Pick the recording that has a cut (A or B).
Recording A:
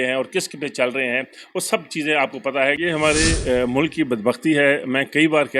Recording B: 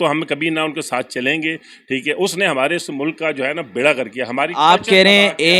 A